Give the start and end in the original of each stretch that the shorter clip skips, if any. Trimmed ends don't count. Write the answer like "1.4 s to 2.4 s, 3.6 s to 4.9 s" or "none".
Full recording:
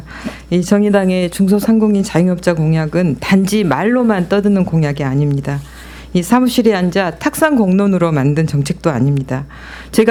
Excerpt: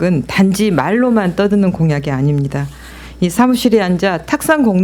none